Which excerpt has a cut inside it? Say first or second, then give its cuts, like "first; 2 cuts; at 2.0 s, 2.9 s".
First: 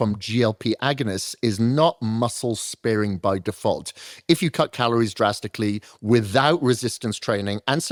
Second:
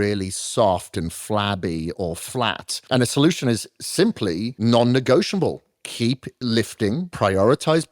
second; 4 cuts; at 2.7 s, 4.5 s, 6.3 s, 7.1 s